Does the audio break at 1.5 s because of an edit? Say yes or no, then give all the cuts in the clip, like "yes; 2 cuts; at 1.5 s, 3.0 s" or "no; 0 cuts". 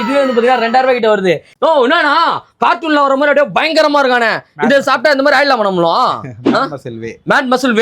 yes; 1 cut; at 1.5 s